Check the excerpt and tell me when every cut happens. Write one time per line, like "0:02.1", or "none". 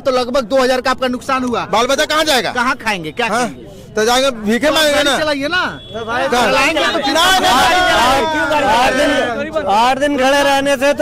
none